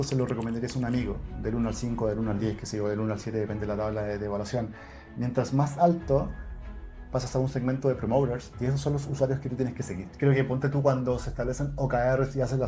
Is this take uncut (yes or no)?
no